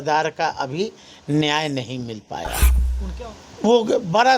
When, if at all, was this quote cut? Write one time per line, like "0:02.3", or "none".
0:02.9